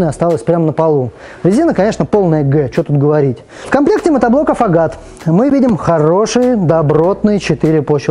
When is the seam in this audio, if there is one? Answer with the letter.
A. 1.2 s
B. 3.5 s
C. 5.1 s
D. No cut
B